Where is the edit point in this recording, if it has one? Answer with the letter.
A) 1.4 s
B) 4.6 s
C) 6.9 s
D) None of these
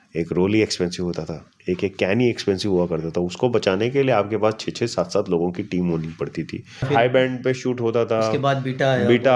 C